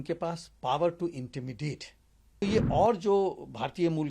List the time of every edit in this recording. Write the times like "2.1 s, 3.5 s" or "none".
2.4 s